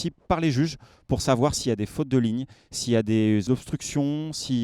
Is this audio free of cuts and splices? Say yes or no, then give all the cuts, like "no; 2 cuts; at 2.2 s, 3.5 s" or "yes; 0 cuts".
no; 1 cut; at 3.4 s